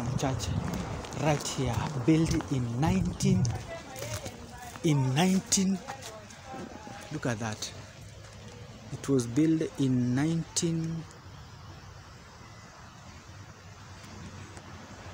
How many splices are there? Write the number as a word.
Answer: zero